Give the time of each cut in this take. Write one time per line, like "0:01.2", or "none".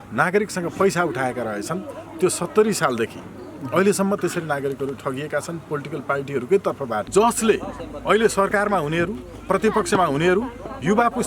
0:07.1